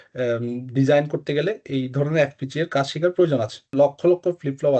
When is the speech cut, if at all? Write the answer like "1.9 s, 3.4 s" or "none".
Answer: 3.7 s